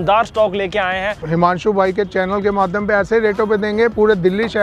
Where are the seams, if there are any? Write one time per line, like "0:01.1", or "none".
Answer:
0:01.2